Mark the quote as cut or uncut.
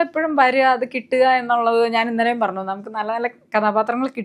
uncut